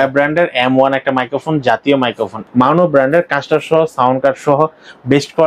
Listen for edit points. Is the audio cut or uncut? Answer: cut